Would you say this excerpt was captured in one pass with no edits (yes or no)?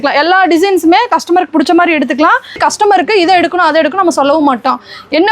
no